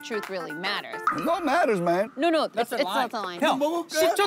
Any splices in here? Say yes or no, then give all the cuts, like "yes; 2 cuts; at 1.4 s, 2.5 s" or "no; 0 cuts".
yes; 1 cut; at 3.3 s